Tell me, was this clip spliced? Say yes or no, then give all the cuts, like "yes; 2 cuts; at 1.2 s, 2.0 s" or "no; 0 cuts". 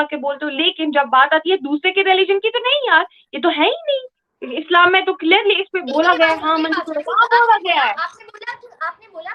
no; 0 cuts